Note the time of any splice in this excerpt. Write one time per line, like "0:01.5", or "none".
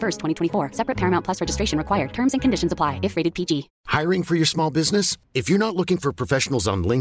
0:03.8